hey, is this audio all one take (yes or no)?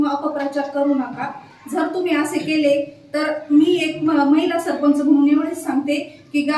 yes